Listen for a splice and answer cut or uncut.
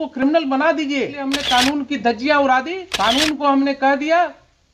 cut